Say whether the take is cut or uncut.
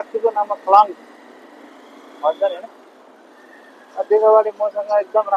uncut